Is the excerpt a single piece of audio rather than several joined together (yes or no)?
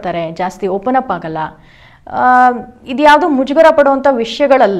yes